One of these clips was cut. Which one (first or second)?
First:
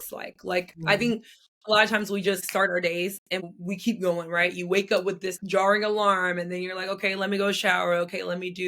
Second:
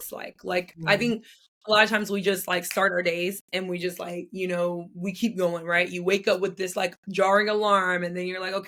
first